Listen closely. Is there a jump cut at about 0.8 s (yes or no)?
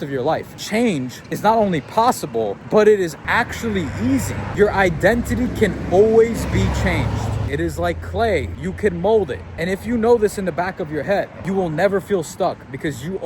yes